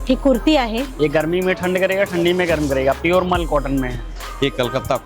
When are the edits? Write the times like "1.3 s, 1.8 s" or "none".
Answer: 0.9 s, 4.1 s